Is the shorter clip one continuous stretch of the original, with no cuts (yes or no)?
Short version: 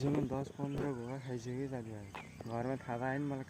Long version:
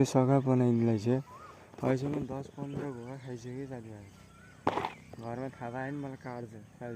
no